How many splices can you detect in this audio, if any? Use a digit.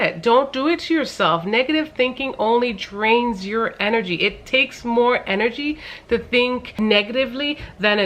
1